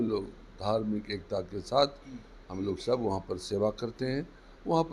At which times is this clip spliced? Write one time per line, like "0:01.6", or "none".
none